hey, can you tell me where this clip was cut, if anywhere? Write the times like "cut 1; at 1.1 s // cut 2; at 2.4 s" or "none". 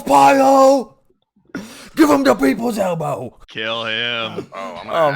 cut 1; at 1.0 s // cut 2; at 3.4 s